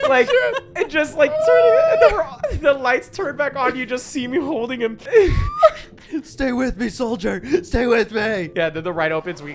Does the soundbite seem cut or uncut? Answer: cut